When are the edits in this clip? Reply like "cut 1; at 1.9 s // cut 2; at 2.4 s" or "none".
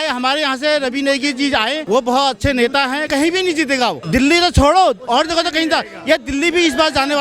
cut 1; at 1.8 s // cut 2; at 3.0 s // cut 3; at 4.0 s